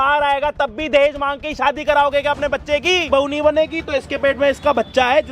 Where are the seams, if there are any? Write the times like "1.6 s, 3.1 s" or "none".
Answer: 3.0 s

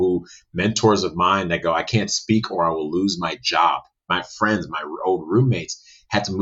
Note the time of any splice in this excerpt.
4.2 s

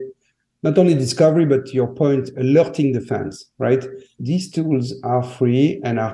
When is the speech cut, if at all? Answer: 4.2 s

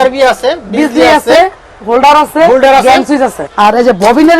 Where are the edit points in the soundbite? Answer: 3.4 s

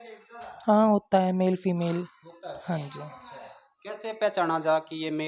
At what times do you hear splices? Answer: none

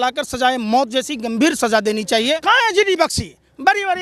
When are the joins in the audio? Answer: 2.4 s

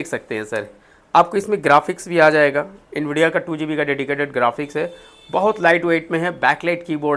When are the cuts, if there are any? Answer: none

